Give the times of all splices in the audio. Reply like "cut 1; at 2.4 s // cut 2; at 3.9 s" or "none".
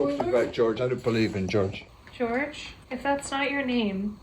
cut 1; at 1.8 s // cut 2; at 2.7 s

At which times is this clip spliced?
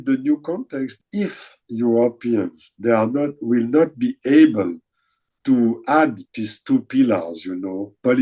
cut 1; at 0.9 s

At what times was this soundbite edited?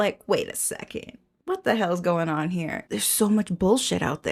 cut 1; at 2.8 s

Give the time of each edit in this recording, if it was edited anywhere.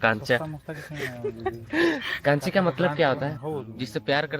cut 1; at 3.4 s

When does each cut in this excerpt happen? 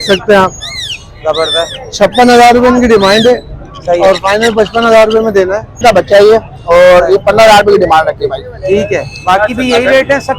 cut 1; at 5.8 s

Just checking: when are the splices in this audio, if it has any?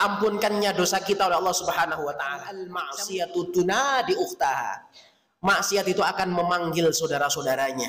cut 1; at 2.8 s

